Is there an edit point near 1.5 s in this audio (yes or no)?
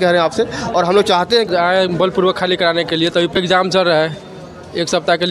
yes